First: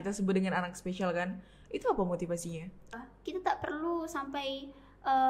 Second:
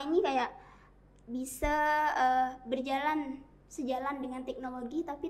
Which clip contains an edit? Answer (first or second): first